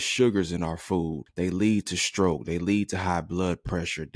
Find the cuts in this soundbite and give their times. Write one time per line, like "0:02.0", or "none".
0:01.2